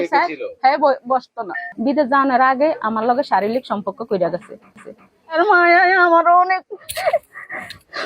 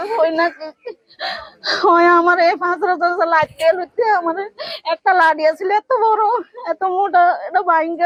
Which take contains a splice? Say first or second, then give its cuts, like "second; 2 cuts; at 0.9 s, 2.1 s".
first; 2 cuts; at 1.7 s, 4.9 s